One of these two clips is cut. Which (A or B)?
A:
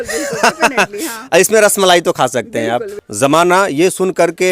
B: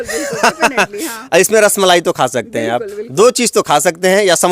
A